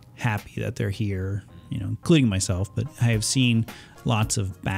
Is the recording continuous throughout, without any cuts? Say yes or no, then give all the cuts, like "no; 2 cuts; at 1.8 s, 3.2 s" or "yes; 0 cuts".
no; 1 cut; at 2.9 s